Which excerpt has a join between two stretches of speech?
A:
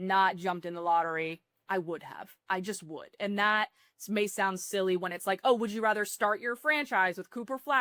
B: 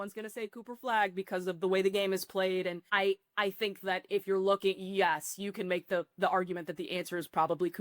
B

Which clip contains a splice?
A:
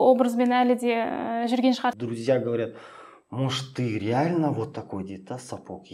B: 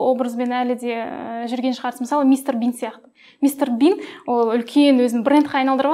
A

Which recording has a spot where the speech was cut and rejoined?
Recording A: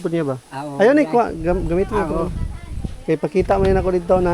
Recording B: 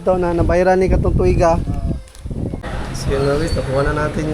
B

